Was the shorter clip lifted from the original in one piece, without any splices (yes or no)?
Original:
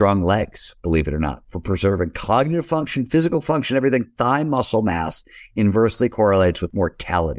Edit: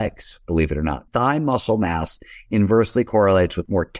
no